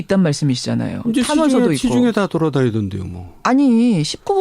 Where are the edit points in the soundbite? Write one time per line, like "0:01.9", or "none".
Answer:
0:03.4